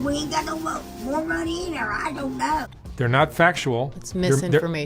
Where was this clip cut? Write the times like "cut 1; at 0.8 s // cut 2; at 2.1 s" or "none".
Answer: cut 1; at 2.7 s

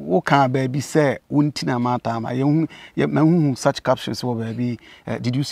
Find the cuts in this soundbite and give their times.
none

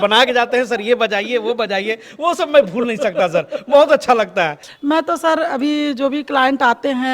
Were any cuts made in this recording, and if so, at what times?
cut 1; at 4.6 s

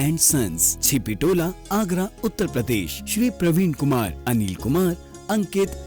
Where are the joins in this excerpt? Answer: none

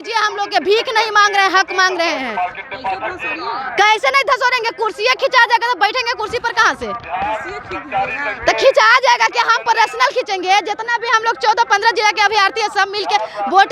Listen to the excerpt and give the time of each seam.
none

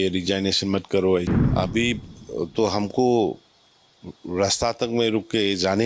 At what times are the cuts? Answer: cut 1; at 1.3 s

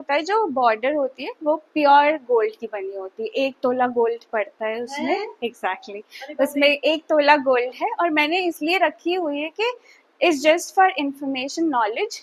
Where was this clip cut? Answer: none

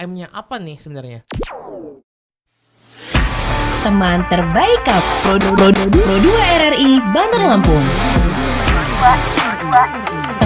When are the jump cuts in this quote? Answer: cut 1; at 1.2 s

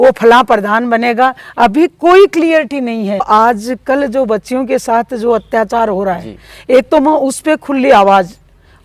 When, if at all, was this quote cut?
cut 1; at 3.3 s

